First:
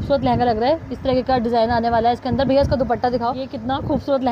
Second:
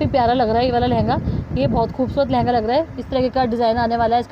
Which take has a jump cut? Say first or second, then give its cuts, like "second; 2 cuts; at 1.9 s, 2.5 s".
first; 1 cut; at 3.2 s